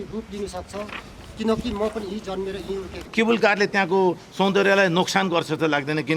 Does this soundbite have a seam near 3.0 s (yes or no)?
yes